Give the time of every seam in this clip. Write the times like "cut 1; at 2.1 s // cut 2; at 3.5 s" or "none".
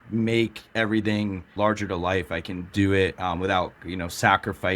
cut 1; at 1.6 s